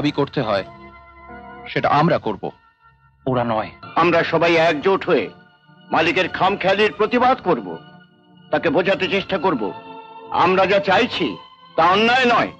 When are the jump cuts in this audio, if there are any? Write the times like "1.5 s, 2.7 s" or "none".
3.8 s